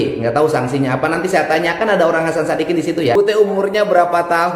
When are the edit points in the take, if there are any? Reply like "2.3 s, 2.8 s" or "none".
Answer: 3.1 s